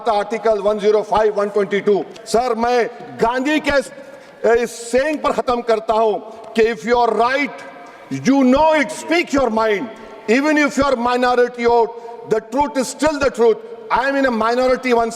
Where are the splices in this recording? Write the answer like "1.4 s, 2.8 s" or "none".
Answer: 2.2 s